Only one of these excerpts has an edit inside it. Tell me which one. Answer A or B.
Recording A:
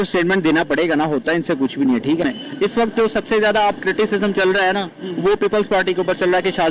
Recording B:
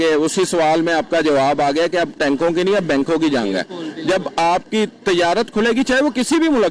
A